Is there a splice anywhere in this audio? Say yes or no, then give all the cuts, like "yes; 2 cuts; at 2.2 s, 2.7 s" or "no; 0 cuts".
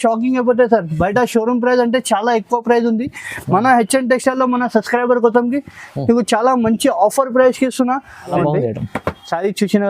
yes; 1 cut; at 8.3 s